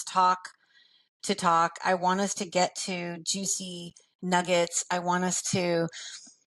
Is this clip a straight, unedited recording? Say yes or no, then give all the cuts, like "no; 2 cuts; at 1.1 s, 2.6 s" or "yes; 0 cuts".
yes; 0 cuts